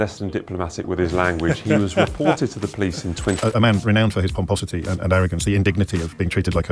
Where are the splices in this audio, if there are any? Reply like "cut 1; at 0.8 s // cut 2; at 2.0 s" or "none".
cut 1; at 3.4 s

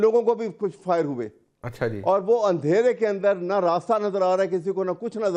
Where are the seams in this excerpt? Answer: none

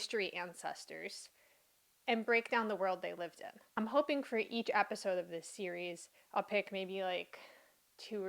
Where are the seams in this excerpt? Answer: cut 1; at 3.6 s

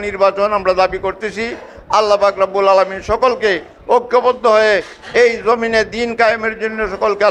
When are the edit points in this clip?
none

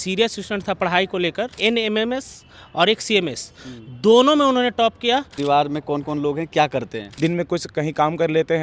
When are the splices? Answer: cut 1; at 1.5 s // cut 2; at 5.3 s // cut 3; at 7.0 s

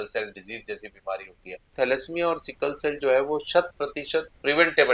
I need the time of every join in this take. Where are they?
cut 1; at 1.7 s

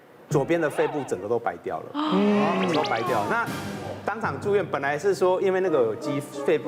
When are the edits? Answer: none

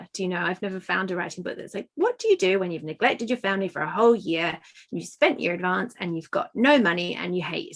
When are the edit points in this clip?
none

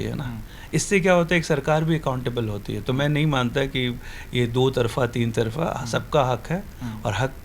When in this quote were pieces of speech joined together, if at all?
none

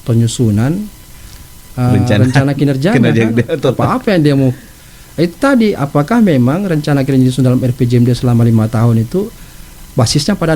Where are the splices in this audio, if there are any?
none

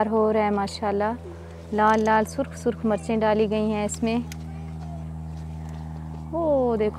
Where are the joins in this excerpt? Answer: none

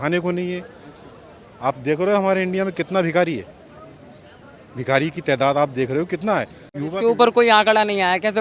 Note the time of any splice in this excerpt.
cut 1; at 6.7 s

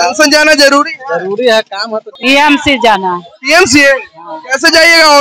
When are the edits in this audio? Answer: cut 1; at 2.1 s

